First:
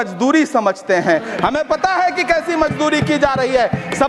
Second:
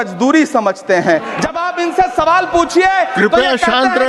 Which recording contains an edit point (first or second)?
second